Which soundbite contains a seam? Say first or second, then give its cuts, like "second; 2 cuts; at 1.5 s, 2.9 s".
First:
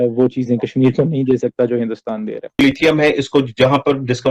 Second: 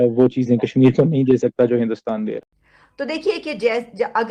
first; 1 cut; at 2.6 s